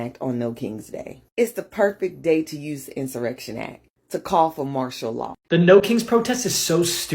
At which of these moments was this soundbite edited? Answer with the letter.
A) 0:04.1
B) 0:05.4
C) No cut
B